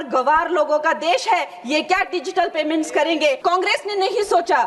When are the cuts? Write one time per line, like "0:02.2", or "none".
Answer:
0:03.4